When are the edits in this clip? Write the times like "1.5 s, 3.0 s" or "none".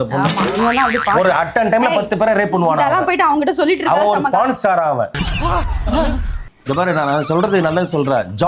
none